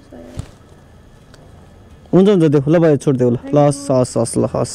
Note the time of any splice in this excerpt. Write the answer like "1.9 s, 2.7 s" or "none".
none